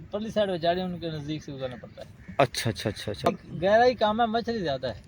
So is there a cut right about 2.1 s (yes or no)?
no